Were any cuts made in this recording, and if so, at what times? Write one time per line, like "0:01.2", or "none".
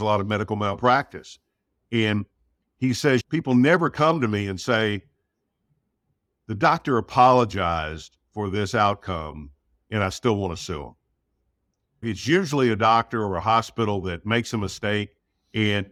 none